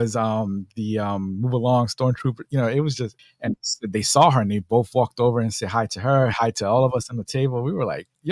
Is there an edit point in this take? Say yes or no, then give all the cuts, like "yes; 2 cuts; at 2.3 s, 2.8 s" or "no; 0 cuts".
yes; 1 cut; at 3.1 s